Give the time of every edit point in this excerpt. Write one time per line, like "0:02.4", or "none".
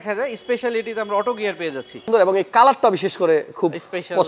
0:02.0